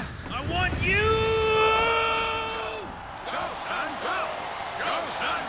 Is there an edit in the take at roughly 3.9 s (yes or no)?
no